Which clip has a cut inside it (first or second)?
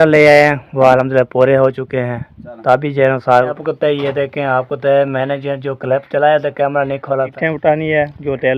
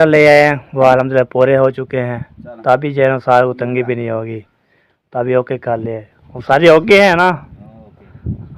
first